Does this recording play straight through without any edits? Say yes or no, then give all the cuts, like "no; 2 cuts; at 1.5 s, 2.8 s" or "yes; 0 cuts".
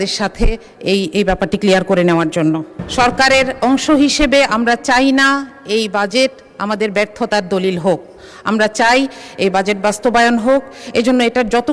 no; 1 cut; at 2.8 s